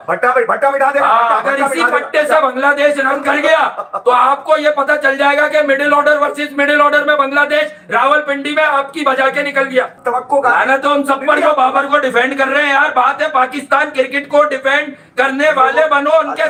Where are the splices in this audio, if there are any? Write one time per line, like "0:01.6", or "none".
none